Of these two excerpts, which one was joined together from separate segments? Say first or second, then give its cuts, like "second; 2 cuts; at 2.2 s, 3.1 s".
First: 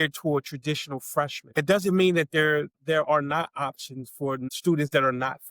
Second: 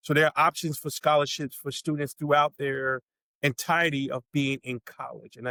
first; 3 cuts; at 1.4 s, 2.8 s, 4.4 s